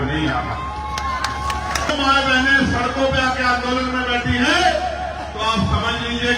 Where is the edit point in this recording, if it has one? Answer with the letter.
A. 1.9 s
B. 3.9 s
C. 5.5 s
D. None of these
A